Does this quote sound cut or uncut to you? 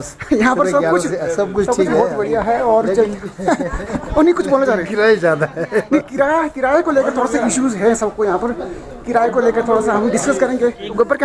uncut